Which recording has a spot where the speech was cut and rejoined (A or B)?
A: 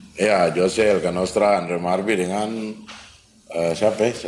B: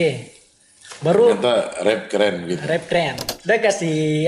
B